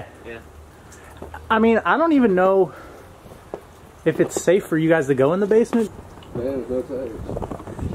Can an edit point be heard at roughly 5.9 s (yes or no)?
yes